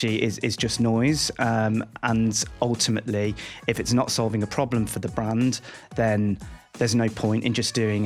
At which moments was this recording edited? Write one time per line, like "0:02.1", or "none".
none